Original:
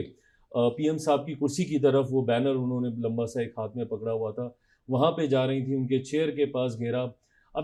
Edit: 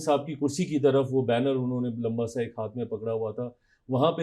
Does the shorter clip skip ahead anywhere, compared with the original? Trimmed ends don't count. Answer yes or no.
no